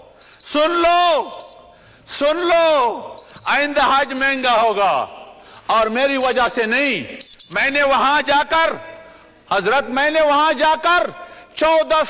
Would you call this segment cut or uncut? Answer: uncut